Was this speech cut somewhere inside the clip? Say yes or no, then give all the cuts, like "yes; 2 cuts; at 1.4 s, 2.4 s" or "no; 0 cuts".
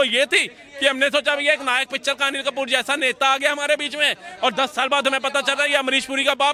no; 0 cuts